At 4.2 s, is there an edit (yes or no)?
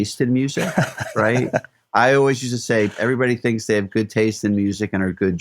no